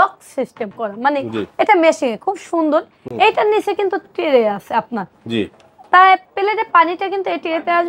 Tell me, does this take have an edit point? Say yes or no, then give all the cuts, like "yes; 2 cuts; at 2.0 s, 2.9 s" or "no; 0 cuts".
no; 0 cuts